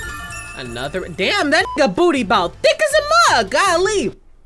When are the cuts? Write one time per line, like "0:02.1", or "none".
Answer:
none